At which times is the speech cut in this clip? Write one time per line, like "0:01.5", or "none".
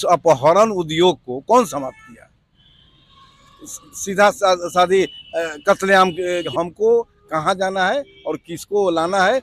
0:06.5